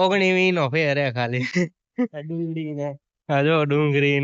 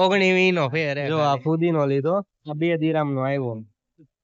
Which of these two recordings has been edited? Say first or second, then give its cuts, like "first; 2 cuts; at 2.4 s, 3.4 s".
second; 1 cut; at 1.0 s